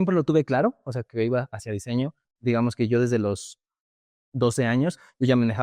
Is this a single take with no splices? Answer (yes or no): no